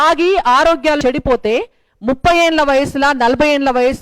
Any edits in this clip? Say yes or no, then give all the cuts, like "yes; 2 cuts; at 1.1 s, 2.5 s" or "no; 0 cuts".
yes; 1 cut; at 1.0 s